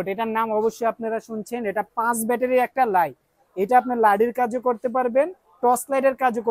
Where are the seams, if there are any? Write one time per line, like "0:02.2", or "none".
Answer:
none